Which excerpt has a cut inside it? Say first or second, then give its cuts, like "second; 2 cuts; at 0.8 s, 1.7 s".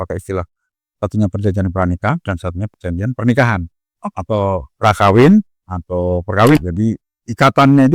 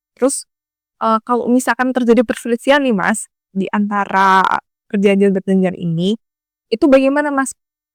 first; 1 cut; at 6.6 s